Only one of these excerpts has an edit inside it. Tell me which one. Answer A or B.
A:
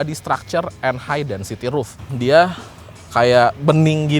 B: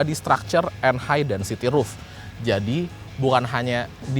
A